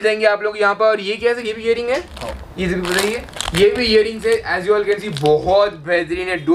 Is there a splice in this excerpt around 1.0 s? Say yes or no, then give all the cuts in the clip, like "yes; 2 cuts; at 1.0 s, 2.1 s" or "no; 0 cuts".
no; 0 cuts